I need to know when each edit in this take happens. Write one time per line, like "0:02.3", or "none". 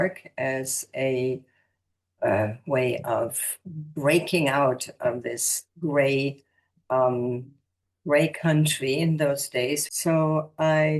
0:09.8